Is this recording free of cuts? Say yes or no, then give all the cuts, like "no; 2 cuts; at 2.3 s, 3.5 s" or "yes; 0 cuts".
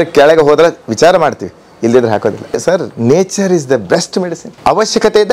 no; 2 cuts; at 2.6 s, 4.4 s